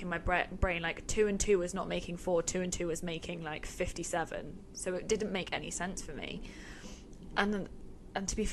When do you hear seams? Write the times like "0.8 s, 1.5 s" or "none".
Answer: none